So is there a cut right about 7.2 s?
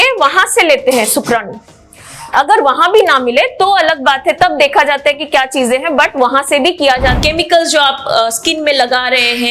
yes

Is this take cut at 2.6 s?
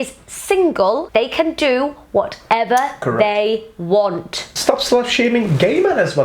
no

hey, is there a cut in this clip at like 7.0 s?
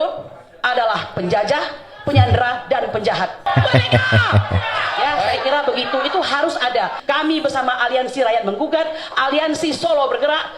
yes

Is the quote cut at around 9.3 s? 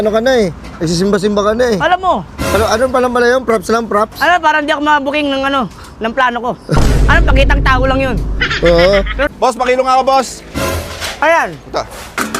yes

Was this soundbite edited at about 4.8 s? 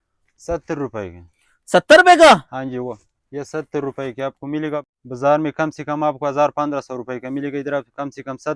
yes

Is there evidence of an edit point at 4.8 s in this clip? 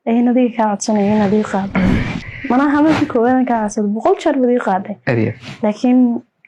no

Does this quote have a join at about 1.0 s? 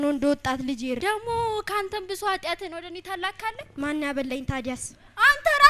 yes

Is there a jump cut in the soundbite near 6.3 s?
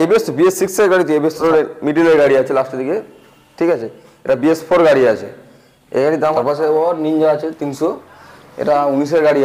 yes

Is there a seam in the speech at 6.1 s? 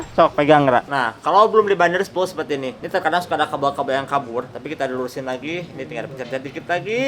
no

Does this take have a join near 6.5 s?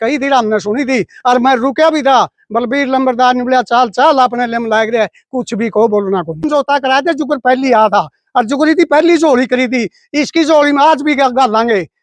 yes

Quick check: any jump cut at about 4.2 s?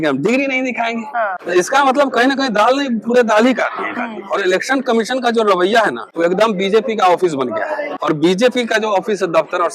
yes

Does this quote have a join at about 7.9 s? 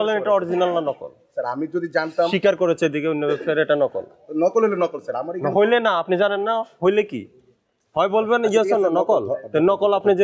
no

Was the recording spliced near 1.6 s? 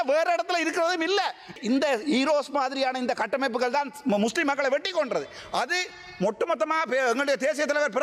yes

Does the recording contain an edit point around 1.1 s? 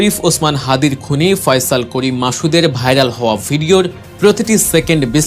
no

